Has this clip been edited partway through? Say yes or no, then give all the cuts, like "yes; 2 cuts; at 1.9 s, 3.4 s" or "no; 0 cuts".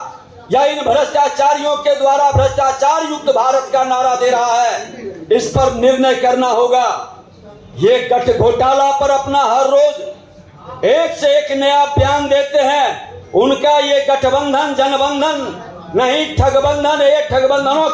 no; 0 cuts